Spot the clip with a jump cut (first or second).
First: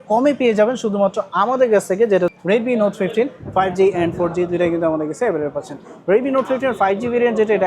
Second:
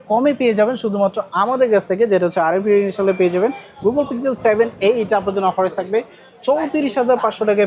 first